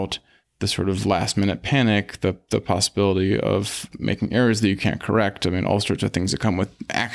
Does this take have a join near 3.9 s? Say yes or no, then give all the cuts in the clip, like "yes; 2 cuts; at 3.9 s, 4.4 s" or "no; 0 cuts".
yes; 1 cut; at 3.9 s